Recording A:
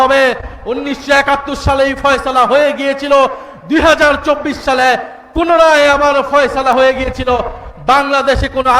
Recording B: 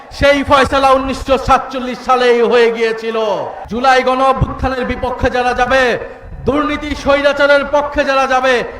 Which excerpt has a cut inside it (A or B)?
B